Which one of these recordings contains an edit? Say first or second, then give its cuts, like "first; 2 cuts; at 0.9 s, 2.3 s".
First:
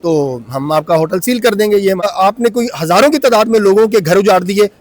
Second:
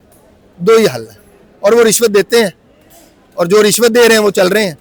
first; 1 cut; at 2.0 s